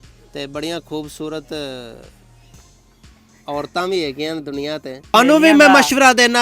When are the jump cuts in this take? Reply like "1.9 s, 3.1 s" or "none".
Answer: 5.1 s